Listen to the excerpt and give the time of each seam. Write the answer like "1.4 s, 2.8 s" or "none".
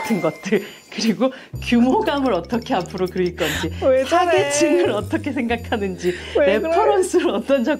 none